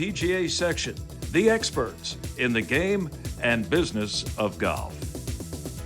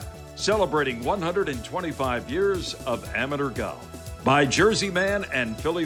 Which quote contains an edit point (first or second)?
first